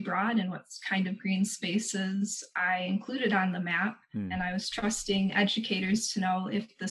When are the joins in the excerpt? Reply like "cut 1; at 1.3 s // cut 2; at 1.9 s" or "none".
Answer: none